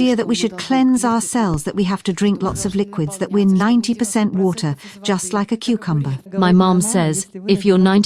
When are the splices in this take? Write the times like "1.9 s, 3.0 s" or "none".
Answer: 6.2 s